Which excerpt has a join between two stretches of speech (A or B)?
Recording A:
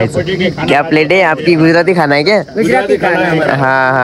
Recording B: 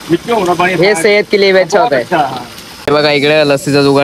B